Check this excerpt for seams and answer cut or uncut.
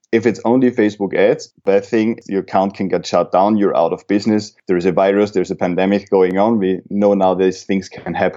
cut